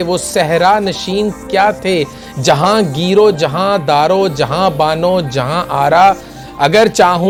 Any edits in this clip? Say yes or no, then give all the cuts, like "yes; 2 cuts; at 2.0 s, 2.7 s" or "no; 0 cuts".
no; 0 cuts